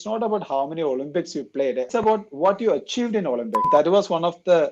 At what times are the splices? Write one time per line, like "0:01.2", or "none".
0:01.9
0:03.7